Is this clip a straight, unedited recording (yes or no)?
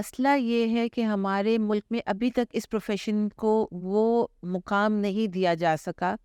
yes